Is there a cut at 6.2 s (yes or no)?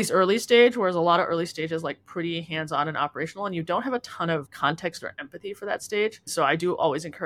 yes